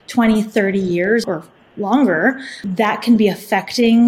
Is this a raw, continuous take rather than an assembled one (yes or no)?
no